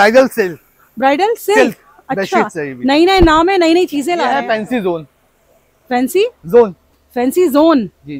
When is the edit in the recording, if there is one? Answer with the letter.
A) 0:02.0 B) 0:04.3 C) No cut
B